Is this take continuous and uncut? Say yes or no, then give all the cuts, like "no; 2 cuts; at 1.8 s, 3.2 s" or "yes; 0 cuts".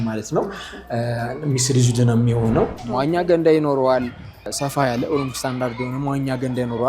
no; 1 cut; at 2.8 s